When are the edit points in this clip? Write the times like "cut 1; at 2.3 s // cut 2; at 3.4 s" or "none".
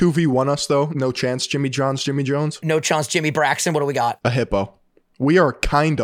cut 1; at 0.9 s // cut 2; at 2.6 s // cut 3; at 4.2 s